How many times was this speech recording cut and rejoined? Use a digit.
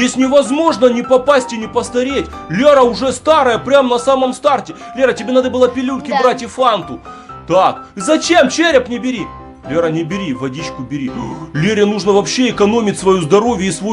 0